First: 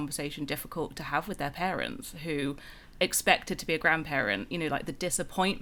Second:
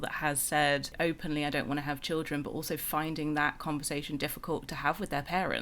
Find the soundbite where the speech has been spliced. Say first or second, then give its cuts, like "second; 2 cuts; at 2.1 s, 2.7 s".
second; 1 cut; at 0.9 s